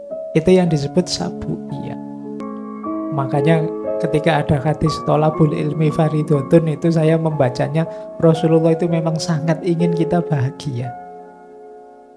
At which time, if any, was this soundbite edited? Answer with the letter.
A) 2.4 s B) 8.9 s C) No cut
A